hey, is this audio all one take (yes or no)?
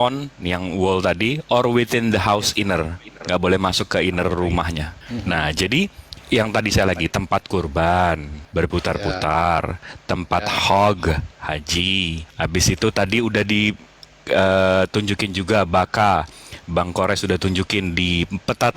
no